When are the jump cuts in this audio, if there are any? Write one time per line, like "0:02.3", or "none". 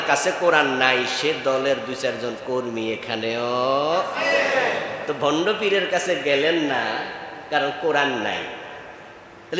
none

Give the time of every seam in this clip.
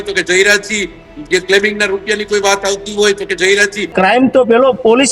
0:03.9

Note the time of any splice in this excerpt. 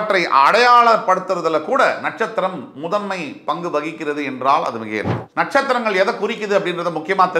0:05.2

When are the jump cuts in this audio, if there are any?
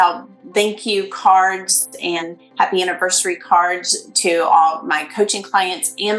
0:02.2

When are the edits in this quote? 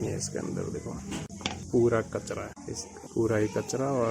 none

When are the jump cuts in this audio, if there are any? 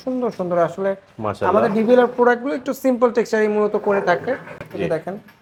none

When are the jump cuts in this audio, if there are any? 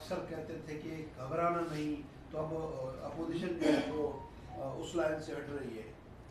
0:01.4

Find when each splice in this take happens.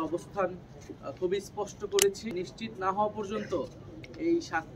0:02.3

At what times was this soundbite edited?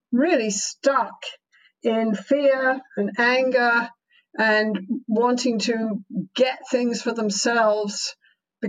none

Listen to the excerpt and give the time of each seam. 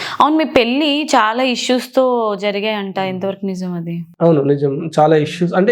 none

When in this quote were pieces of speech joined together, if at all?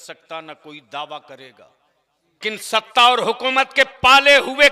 0:02.4

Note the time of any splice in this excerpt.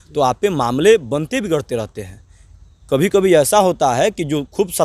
none

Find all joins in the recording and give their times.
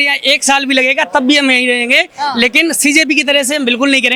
none

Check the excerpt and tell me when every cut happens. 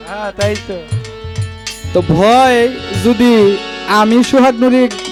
none

